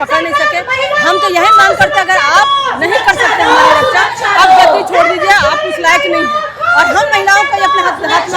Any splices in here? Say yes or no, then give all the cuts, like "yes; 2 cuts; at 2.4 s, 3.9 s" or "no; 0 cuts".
no; 0 cuts